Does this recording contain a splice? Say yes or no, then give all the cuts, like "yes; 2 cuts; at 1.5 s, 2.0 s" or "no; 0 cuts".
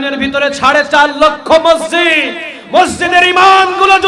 no; 0 cuts